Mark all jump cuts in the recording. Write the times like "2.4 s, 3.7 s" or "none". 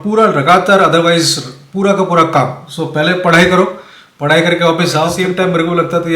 5.2 s

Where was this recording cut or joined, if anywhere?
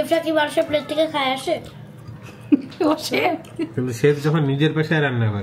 none

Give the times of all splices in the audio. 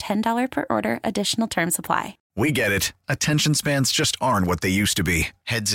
2.2 s

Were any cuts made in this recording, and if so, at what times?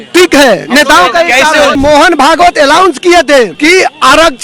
1.7 s, 3.5 s

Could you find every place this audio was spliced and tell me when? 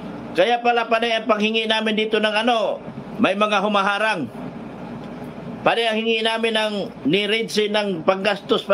none

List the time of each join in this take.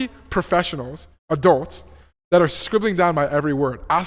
none

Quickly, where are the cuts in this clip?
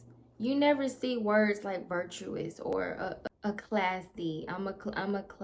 2.7 s

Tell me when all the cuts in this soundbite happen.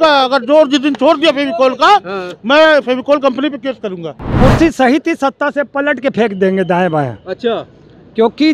4.3 s

